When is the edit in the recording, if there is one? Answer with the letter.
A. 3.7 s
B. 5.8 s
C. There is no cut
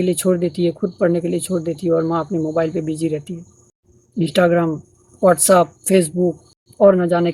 C